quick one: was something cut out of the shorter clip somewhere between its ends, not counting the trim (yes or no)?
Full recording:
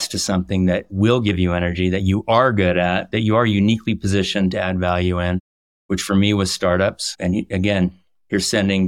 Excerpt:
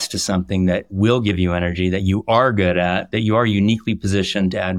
no